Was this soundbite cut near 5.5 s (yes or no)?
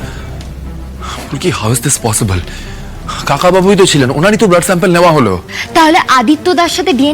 yes